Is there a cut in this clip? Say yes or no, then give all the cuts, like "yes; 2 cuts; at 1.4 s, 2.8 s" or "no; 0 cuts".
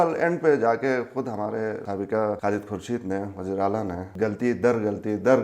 yes; 2 cuts; at 1.9 s, 4.0 s